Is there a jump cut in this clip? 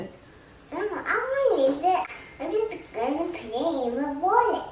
yes; 1 cut; at 2.0 s

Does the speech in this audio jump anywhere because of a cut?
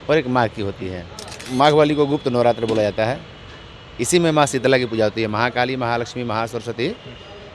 yes; 1 cut; at 1.4 s

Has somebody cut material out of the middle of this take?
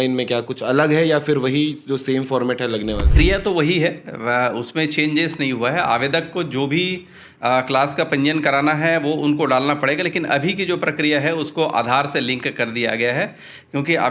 yes; 1 cut; at 3.1 s

